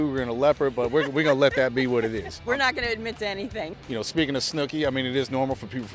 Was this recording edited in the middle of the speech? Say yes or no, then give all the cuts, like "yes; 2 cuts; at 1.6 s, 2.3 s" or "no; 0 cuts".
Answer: yes; 2 cuts; at 2.3 s, 3.7 s